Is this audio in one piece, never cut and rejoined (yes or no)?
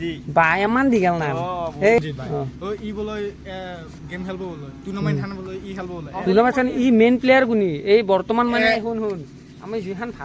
no